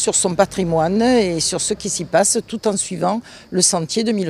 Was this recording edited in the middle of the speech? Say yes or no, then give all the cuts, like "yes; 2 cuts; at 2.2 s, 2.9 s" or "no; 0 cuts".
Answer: yes; 1 cut; at 1.5 s